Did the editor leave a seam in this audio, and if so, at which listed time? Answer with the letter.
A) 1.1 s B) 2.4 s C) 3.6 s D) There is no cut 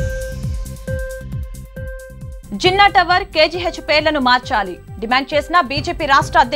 D